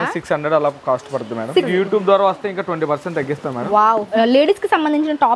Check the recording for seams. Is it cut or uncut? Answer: cut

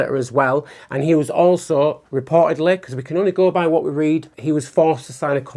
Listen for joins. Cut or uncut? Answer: cut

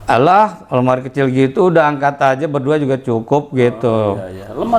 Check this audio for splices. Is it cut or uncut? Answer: uncut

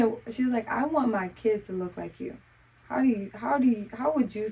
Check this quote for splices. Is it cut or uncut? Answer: uncut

